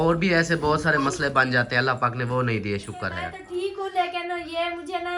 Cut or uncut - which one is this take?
cut